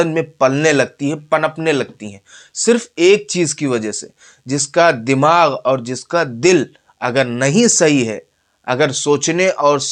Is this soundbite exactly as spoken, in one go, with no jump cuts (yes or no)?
yes